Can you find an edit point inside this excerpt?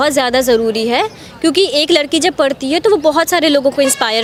no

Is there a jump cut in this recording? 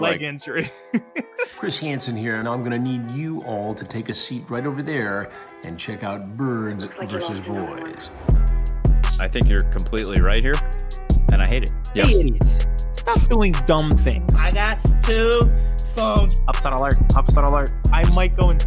yes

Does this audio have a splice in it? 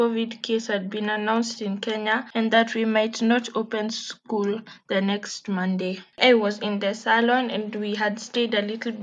yes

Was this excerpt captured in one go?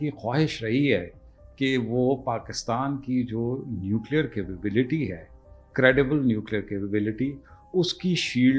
yes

